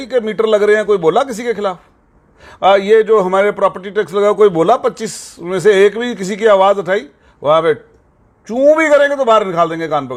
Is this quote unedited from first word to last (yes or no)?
yes